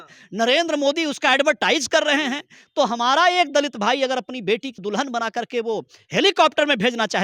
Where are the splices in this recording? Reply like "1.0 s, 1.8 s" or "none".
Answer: 4.8 s

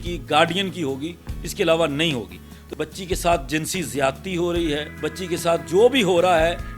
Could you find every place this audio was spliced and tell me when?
2.6 s

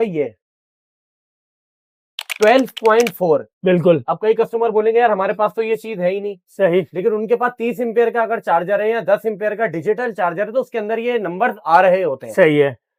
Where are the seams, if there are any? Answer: none

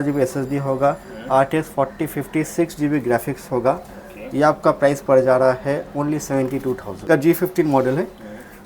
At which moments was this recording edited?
7.1 s

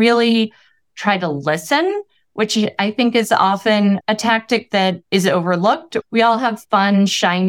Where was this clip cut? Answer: 4.0 s, 5.0 s, 5.9 s

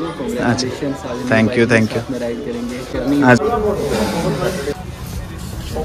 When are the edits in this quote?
2.9 s

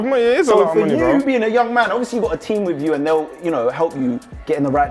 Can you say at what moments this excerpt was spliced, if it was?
none

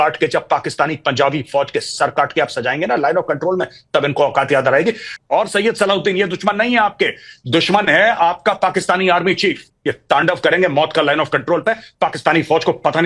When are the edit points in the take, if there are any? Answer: 5.1 s, 9.7 s

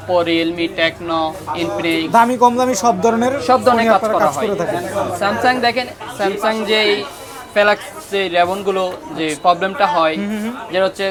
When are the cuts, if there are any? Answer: none

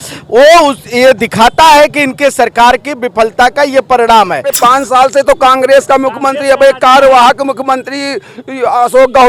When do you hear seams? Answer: 4.5 s

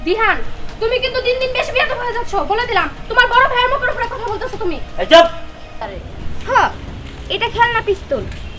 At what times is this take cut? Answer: 6.0 s

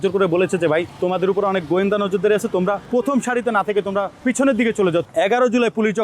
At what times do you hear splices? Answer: 0.9 s, 2.8 s, 4.1 s, 5.1 s

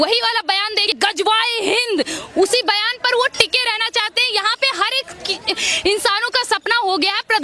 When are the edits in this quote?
0.9 s

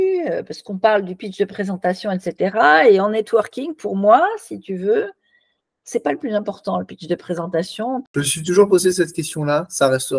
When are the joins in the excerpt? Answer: 8.0 s

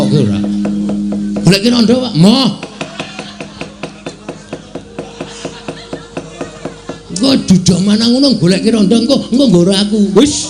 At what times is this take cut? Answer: none

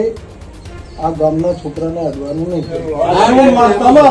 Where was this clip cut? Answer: 2.8 s

